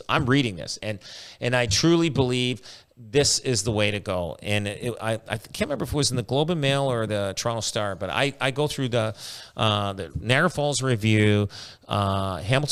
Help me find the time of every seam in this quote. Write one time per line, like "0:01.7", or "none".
none